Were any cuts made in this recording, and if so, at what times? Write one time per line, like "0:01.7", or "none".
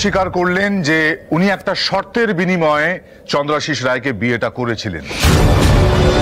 none

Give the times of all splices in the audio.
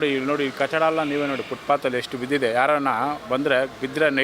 none

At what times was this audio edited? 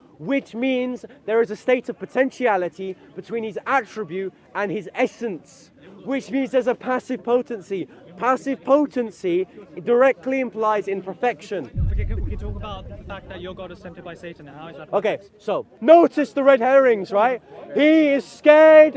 0:15.7

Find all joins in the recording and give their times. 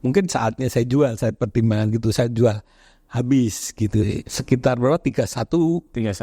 0:04.4

